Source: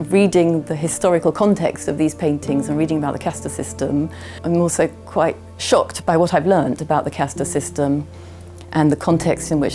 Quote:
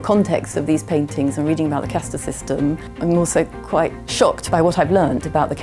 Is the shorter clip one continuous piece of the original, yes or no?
no